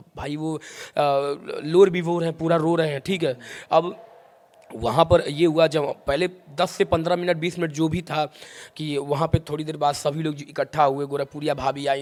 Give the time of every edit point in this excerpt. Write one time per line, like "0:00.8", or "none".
none